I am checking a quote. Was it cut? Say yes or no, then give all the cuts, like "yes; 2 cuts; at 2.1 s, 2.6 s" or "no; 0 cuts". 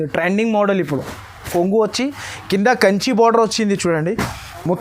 yes; 1 cut; at 1.5 s